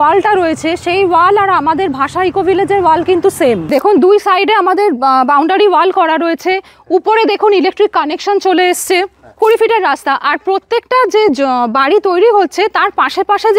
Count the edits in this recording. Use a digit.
2